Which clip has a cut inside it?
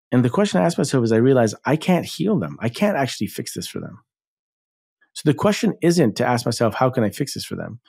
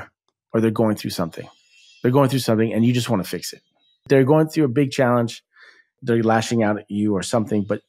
second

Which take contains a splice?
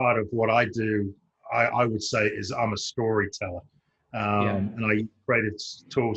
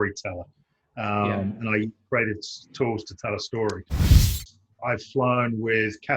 second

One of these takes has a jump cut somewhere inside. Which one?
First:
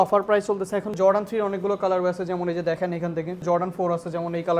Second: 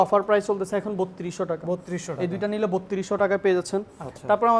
first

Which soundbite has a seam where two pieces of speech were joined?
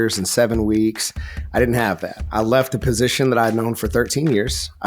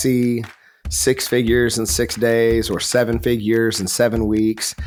first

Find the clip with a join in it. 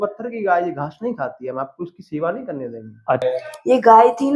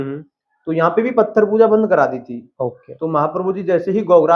first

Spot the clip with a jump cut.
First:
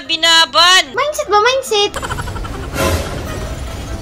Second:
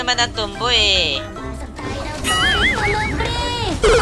first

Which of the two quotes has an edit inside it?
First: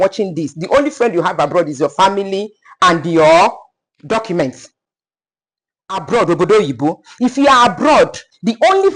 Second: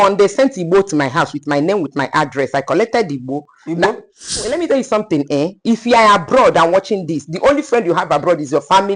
second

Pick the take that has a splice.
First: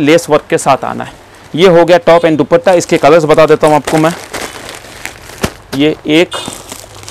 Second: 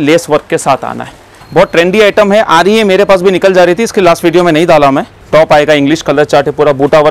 second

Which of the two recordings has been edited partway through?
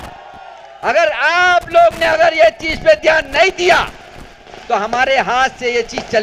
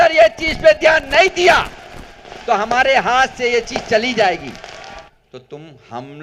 second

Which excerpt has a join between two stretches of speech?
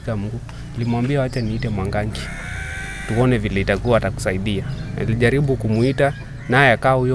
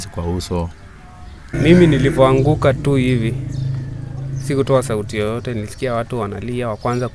second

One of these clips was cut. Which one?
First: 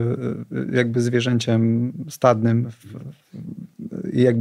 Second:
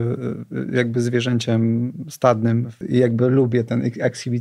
second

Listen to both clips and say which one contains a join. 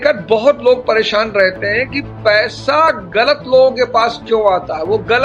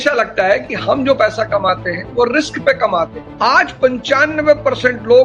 second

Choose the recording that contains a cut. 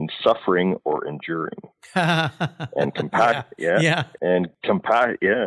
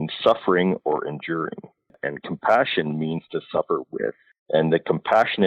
second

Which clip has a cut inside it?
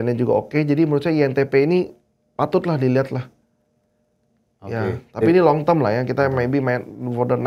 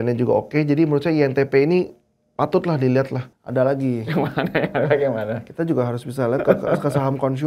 second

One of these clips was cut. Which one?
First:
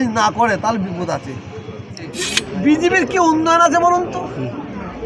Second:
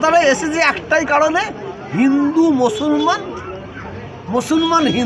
first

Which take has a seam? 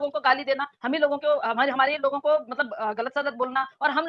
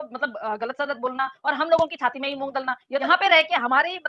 second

